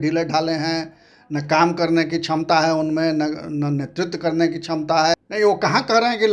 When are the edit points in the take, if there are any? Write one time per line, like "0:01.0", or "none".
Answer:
0:05.2